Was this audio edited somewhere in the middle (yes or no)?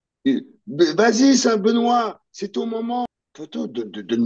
yes